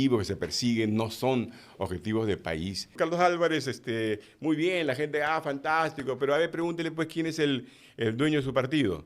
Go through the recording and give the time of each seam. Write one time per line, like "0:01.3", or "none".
0:02.9